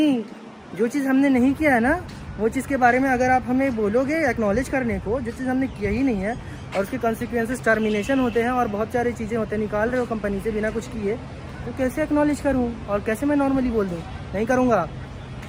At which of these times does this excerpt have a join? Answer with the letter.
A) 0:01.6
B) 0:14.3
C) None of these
C